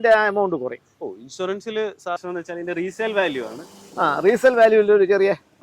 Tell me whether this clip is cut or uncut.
cut